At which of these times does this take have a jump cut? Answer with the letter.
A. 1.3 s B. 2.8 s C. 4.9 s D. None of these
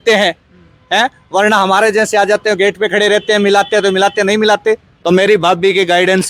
C